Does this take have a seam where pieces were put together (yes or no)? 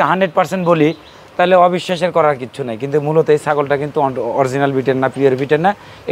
no